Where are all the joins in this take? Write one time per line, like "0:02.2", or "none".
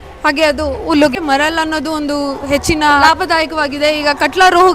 0:01.1
0:03.0